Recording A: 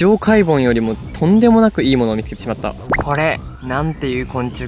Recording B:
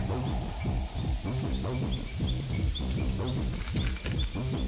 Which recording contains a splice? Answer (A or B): A